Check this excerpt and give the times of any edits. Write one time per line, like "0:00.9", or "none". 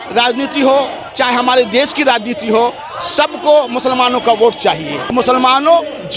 0:05.1